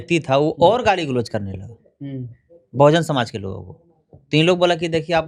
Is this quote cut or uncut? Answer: uncut